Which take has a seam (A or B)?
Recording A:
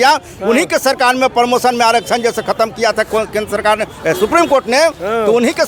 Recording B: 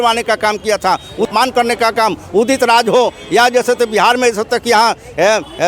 B